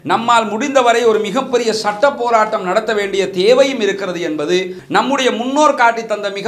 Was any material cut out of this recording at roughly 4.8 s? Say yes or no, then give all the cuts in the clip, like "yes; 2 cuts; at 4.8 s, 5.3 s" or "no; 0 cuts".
yes; 1 cut; at 4.8 s